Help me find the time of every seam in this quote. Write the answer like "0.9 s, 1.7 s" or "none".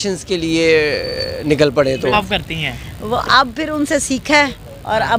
2.1 s